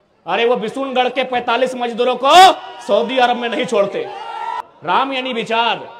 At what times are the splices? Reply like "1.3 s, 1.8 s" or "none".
4.6 s